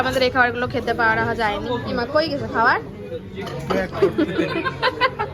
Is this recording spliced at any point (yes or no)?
no